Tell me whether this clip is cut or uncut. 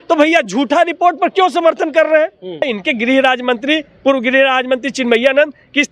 cut